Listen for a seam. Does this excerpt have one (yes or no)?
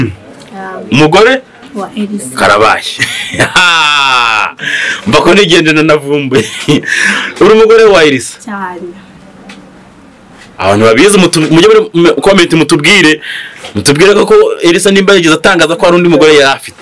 no